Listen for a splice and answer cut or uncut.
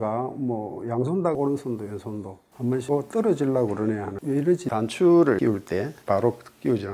cut